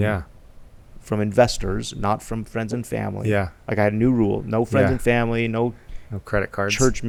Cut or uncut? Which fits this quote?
uncut